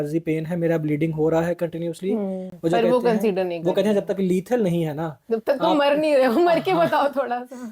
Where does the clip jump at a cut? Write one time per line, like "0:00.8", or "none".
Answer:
none